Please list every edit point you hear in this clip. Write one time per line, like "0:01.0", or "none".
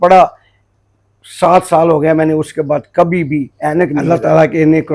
0:04.0